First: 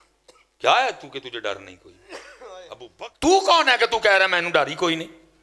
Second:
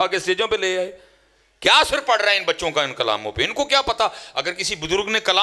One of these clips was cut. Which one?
first; 1 cut; at 2.8 s

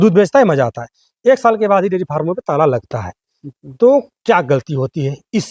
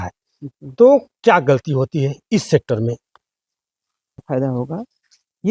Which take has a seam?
second; 1 cut; at 4.2 s

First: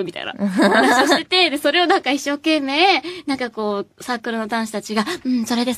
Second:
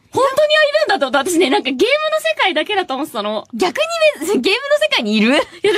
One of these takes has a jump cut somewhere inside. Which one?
second; 1 cut; at 1.1 s

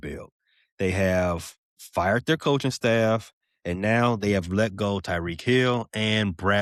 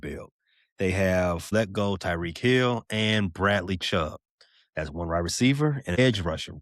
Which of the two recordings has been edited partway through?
second; 1 cut; at 1.5 s

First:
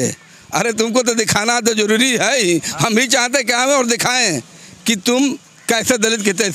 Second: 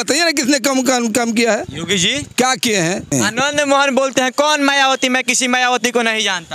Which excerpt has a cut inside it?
second; 1 cut; at 3.1 s

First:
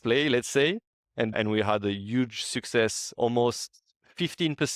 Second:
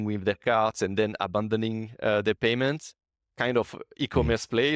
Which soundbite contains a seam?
first; 2 cuts; at 1.3 s, 3.1 s

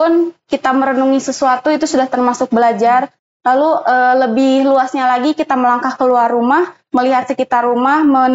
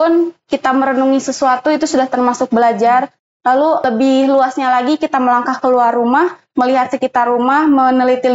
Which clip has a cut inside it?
second; 1 cut; at 3.8 s

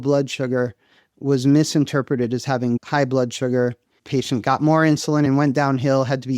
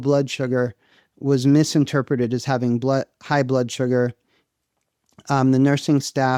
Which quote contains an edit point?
first; 3 cuts; at 2.8 s, 4.0 s, 5.3 s

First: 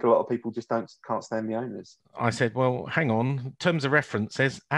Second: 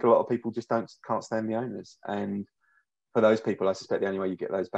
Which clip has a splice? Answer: first; 1 cut; at 2.0 s

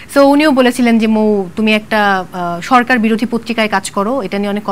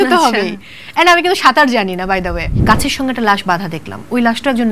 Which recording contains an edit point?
second; 1 cut; at 2.6 s

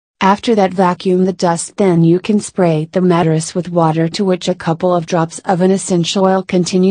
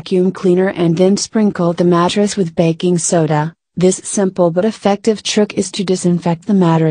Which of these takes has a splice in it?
second; 1 cut; at 4.9 s

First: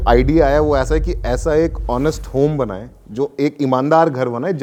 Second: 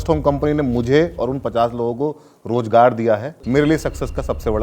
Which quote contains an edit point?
second; 1 cut; at 3.3 s

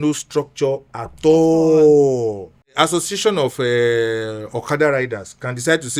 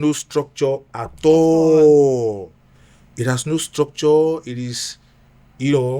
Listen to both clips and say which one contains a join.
first; 1 cut; at 2.7 s

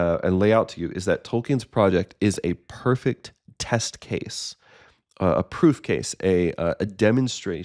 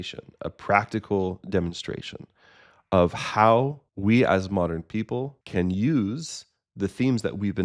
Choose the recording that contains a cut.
second; 2 cuts; at 3.8 s, 5.4 s

